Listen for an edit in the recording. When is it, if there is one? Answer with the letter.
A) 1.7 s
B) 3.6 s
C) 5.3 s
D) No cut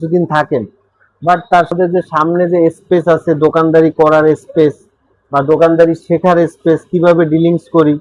A